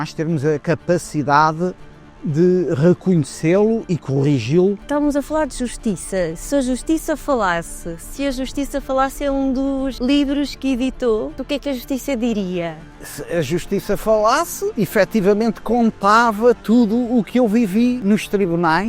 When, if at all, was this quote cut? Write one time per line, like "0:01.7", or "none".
0:04.8
0:09.9
0:11.4
0:13.1
0:14.6
0:18.0

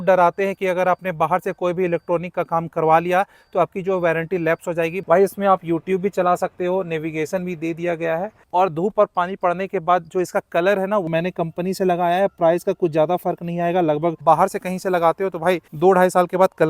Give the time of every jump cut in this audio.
0:05.0
0:08.4
0:11.1
0:14.2
0:15.7

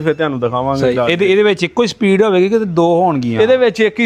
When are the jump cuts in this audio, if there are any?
none

